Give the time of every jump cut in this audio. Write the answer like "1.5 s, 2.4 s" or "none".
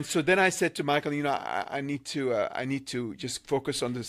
none